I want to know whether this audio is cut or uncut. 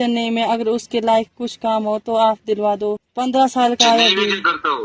cut